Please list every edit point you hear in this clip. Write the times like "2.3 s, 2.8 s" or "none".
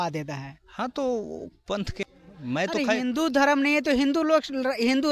2.0 s